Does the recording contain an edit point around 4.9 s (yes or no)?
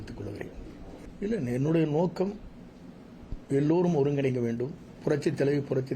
yes